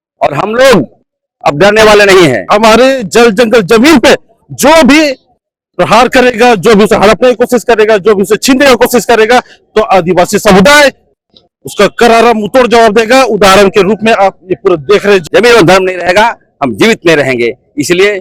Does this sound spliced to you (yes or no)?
yes